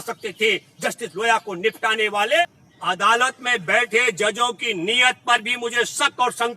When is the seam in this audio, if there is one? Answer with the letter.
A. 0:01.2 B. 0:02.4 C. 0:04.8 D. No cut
B